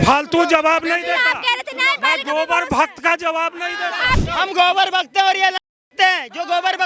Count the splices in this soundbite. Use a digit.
0